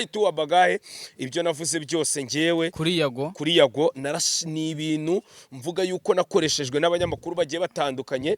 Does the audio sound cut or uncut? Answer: uncut